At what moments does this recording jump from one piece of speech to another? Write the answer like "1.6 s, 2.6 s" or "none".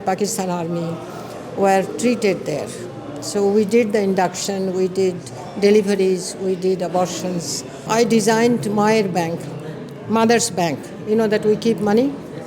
7.9 s